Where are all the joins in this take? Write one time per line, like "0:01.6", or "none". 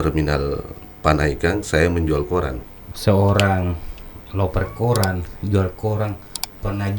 0:02.6